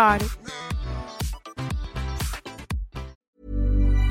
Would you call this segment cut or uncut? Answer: cut